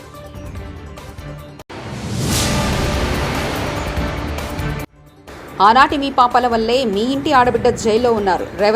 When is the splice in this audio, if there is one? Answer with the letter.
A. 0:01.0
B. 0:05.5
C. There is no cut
A